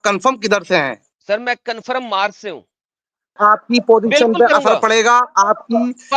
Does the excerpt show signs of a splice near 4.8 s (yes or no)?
no